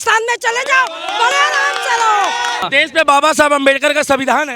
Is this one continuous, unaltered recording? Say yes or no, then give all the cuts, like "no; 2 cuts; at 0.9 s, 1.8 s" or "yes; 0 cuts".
no; 1 cut; at 2.6 s